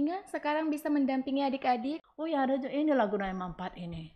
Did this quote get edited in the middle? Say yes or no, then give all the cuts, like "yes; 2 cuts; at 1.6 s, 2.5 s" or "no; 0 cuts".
yes; 1 cut; at 2.0 s